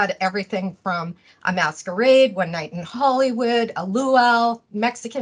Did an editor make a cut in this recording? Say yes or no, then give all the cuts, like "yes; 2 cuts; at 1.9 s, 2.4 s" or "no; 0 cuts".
no; 0 cuts